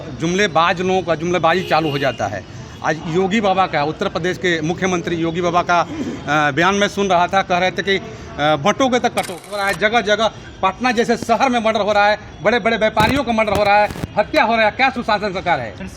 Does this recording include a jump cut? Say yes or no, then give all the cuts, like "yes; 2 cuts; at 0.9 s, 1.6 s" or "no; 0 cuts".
yes; 1 cut; at 9.6 s